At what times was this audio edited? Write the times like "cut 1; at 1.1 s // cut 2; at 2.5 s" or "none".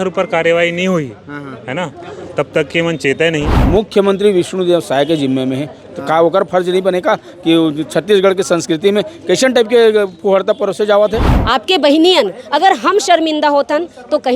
cut 1; at 3.6 s // cut 2; at 11.3 s